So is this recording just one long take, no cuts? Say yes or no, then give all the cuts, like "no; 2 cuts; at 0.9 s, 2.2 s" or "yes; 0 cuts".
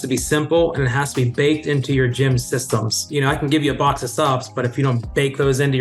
no; 1 cut; at 3.0 s